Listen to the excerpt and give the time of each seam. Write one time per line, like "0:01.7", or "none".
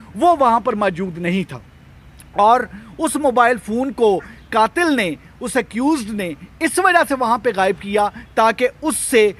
none